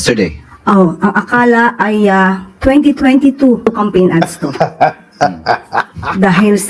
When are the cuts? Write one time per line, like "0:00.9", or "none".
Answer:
0:03.7